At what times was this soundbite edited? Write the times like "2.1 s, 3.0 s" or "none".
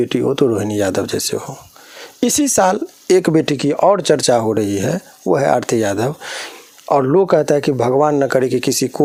none